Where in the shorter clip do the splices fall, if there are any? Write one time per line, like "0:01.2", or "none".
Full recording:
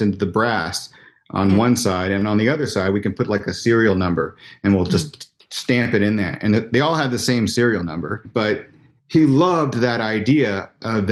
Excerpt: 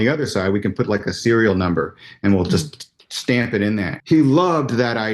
0:03.9